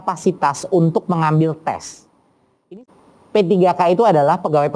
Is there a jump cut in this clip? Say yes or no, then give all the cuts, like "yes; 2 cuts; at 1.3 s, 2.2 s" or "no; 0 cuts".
yes; 1 cut; at 2.8 s